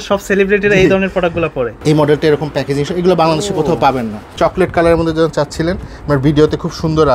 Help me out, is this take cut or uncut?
cut